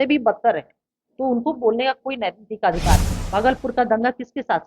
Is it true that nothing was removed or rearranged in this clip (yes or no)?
no